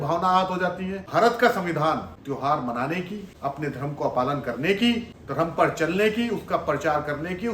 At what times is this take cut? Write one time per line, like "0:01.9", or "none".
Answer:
0:01.0
0:02.1
0:03.2
0:05.2